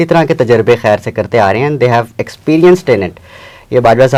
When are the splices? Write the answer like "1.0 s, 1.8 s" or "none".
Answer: none